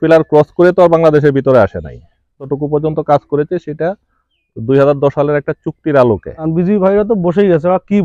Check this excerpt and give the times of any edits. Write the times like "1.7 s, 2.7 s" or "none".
2.5 s, 6.3 s